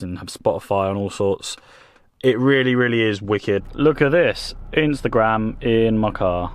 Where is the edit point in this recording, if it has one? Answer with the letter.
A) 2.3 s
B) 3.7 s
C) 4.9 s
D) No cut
B